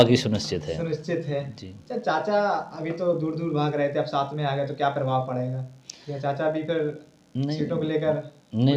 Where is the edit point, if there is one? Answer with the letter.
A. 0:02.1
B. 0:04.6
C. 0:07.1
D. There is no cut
D